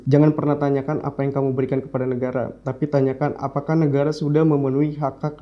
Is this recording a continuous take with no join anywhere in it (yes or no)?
yes